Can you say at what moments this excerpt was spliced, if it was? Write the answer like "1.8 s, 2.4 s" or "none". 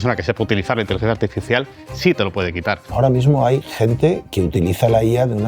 2.8 s, 4.3 s